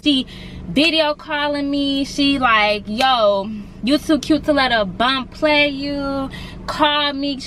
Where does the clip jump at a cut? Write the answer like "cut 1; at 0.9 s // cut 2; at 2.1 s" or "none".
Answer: none